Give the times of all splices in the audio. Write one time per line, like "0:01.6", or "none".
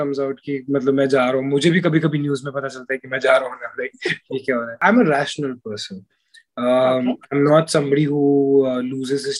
0:04.8